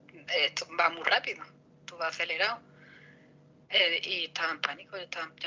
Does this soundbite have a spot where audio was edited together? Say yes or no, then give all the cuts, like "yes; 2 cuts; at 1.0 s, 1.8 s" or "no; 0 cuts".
no; 0 cuts